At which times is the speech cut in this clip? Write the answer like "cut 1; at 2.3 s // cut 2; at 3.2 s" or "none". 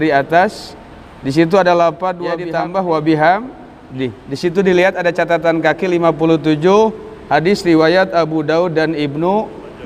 cut 1; at 2.4 s